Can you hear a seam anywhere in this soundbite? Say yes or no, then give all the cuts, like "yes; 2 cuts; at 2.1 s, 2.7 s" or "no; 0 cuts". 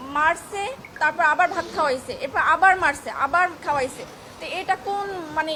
no; 0 cuts